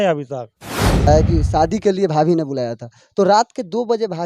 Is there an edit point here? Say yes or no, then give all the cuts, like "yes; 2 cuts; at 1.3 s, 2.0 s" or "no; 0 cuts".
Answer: yes; 1 cut; at 1.1 s